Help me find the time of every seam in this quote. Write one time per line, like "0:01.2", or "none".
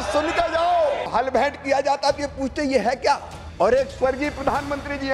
0:01.1
0:03.4